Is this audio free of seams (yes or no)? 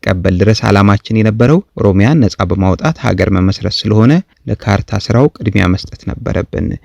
no